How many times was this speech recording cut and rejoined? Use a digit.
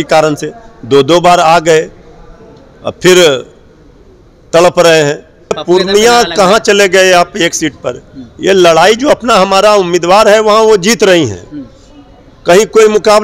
1